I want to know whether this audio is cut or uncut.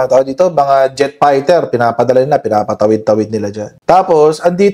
uncut